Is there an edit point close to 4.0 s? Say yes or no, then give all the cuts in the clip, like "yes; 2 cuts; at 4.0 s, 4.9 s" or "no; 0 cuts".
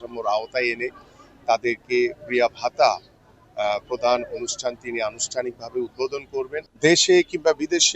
no; 1 cut; at 6.6 s